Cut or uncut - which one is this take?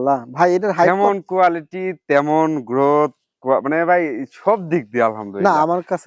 uncut